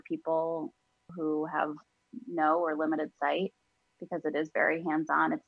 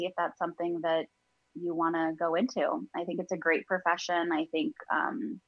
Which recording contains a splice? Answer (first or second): first